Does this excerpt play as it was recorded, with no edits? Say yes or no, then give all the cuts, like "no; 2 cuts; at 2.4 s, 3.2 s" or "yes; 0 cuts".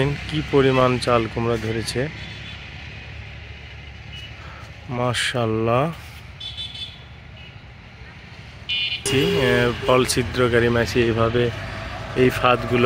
no; 1 cut; at 9.1 s